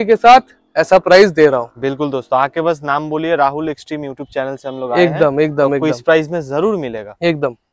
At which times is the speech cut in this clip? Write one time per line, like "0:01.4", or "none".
none